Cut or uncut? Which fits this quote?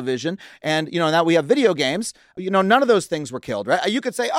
cut